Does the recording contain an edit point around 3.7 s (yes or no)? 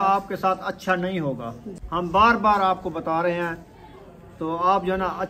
no